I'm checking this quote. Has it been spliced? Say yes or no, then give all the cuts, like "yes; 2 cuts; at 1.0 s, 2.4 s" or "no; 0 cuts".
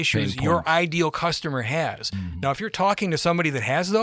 no; 0 cuts